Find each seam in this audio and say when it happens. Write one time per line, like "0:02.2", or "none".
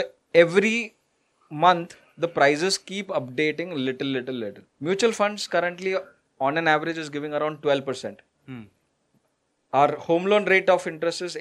0:04.7